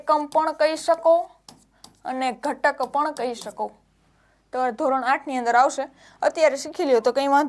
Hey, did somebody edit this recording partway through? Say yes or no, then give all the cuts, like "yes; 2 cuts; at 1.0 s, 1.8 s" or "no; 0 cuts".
no; 0 cuts